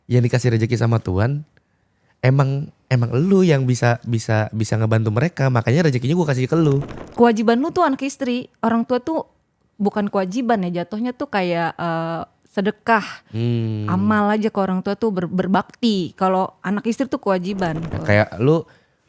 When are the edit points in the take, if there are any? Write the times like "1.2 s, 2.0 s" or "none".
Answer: 7.0 s, 18.0 s